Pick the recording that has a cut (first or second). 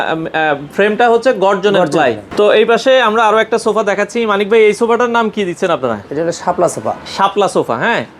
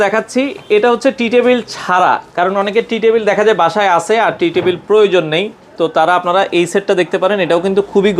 first